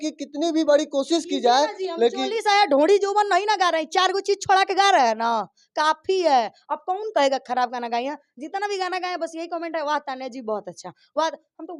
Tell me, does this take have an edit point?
no; 0 cuts

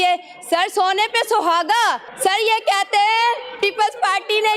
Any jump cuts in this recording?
yes; 1 cut; at 2.1 s

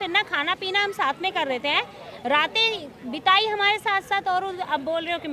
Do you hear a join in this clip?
no; 0 cuts

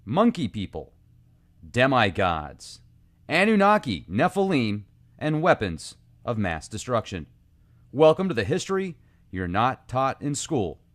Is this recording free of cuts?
yes; 0 cuts

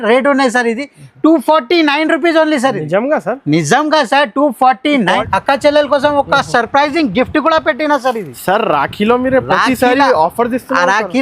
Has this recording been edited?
yes; 1 cut; at 5.2 s

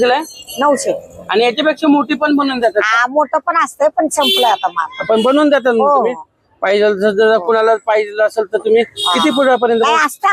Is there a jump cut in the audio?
no; 0 cuts

